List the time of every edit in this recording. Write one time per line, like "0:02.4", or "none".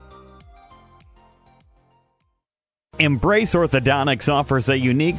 0:02.9